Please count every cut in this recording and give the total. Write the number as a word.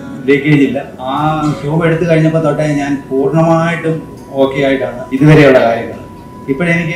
two